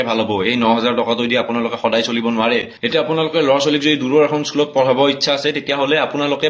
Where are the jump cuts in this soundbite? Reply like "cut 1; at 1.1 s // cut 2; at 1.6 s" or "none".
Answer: cut 1; at 2.7 s